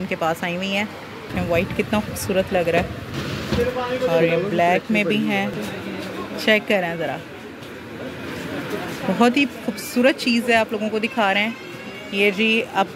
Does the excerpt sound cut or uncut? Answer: cut